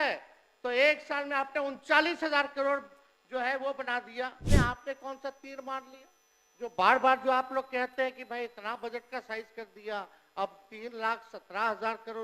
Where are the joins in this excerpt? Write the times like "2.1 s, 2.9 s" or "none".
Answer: 4.4 s